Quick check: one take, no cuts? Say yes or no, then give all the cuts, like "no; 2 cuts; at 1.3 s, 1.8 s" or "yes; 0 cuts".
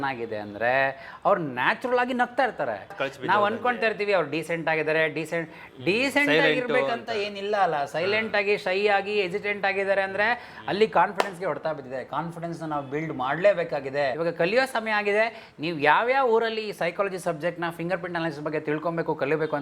no; 2 cuts; at 3.0 s, 14.2 s